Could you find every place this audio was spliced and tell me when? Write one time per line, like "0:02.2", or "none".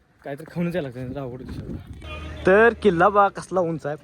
0:02.0